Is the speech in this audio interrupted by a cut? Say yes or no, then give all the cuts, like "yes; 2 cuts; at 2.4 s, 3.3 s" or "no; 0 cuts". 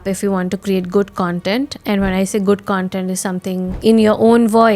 yes; 1 cut; at 3.7 s